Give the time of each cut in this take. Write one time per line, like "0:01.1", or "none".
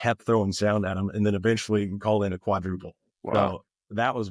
none